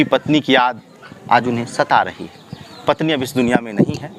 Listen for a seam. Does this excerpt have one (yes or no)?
no